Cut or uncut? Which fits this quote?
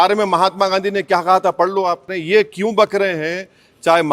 cut